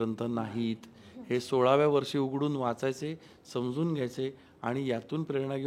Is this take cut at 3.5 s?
no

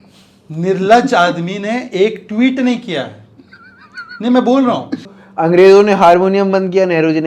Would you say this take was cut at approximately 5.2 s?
yes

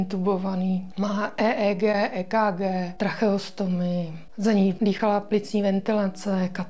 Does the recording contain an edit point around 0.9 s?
yes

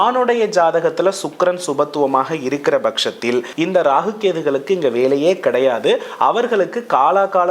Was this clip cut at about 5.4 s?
no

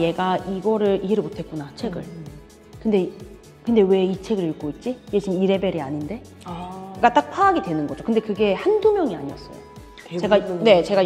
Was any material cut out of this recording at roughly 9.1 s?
no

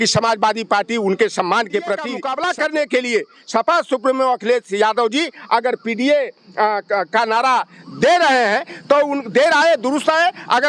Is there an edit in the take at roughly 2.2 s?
yes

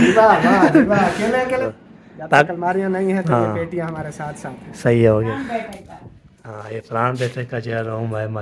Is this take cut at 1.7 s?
yes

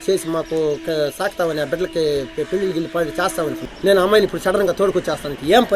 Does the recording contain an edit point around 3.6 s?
yes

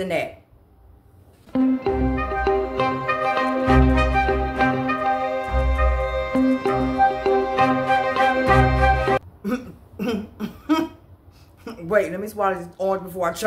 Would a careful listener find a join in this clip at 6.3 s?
yes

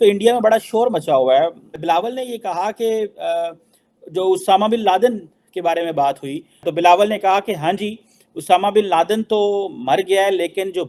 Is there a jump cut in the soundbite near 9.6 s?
no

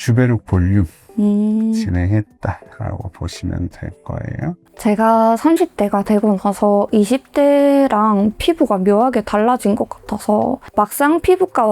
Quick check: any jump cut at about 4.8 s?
yes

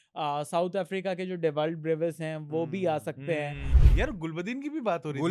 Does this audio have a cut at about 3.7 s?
yes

